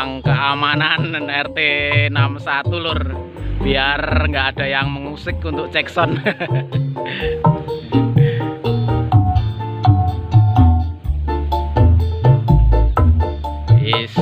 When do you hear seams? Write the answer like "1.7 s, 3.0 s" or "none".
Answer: none